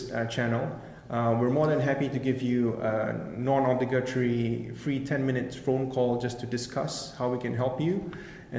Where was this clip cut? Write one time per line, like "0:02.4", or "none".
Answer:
none

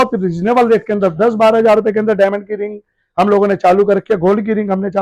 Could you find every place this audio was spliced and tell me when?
none

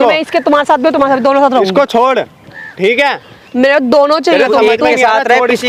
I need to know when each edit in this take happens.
none

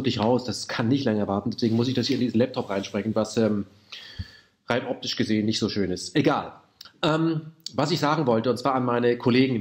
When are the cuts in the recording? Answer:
0:05.7

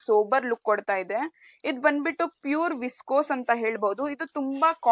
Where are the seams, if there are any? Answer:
none

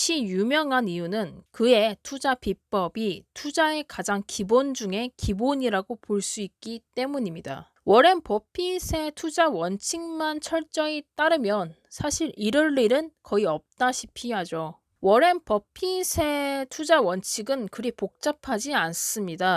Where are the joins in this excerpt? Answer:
0:07.7
0:14.8

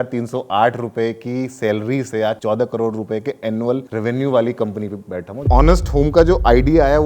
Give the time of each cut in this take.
0:02.4
0:03.9
0:05.4

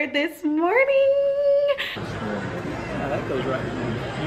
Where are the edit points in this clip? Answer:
0:01.9

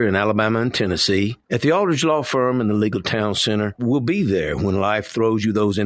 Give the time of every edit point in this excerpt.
0:01.4
0:03.8

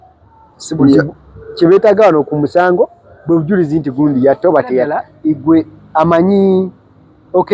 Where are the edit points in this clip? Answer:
0:05.1

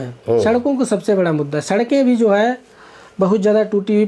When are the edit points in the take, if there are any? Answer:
none

